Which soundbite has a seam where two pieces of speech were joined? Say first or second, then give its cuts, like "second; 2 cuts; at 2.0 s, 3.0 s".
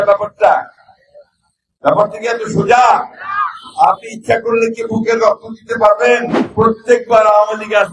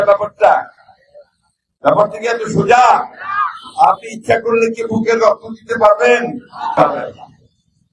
first; 1 cut; at 6.4 s